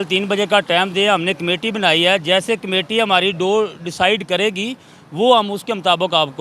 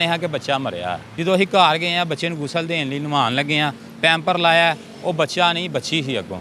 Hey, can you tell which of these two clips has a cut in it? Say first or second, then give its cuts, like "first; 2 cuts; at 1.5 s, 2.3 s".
second; 1 cut; at 1.1 s